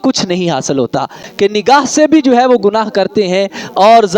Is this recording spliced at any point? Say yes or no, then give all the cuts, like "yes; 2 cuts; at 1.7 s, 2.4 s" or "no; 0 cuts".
yes; 1 cut; at 1.2 s